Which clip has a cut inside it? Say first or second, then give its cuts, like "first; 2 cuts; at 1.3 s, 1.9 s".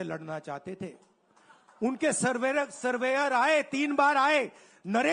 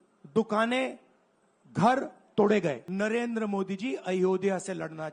second; 1 cut; at 2.8 s